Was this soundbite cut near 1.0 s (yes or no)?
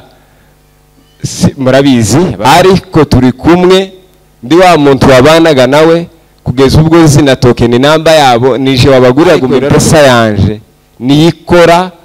no